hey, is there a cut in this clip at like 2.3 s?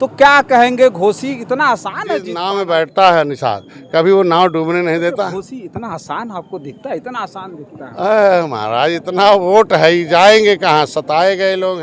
yes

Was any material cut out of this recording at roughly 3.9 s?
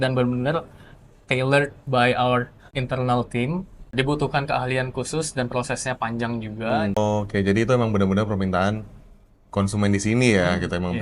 yes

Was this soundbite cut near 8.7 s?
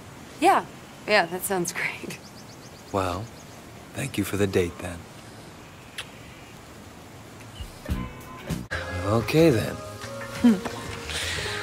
yes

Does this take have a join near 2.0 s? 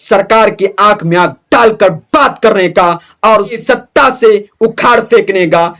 no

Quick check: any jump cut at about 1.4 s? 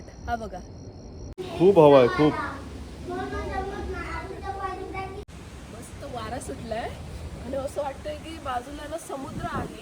yes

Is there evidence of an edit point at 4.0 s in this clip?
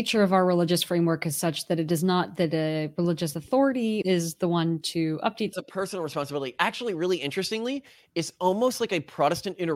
yes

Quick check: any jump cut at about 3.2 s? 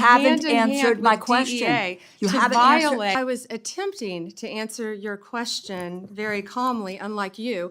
yes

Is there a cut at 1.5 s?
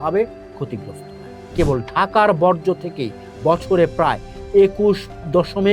yes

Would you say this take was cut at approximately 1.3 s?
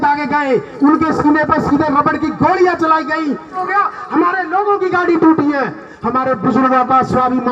no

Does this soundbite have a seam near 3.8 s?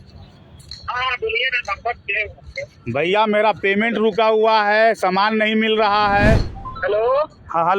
no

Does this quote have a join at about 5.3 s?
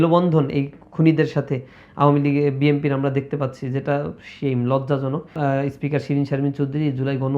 yes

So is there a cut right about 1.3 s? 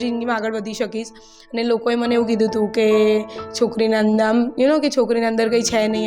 no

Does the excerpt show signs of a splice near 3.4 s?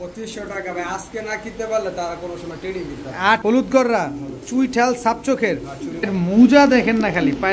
yes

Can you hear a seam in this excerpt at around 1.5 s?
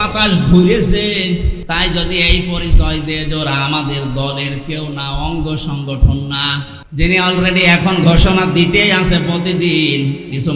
yes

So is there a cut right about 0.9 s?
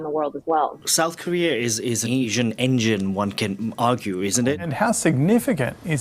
yes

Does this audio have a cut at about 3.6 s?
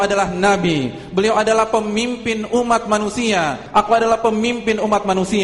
yes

